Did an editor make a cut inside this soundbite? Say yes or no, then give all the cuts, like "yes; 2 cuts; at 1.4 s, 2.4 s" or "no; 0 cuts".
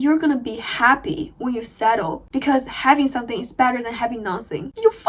no; 0 cuts